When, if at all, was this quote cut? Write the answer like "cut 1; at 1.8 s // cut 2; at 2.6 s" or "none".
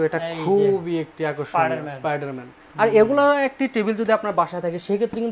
none